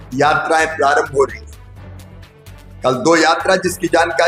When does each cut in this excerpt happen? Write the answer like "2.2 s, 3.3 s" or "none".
none